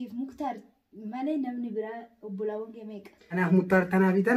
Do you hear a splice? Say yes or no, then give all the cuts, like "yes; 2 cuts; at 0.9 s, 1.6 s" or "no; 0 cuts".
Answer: yes; 1 cut; at 3.4 s